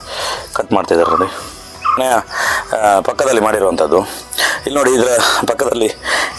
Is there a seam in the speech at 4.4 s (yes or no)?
no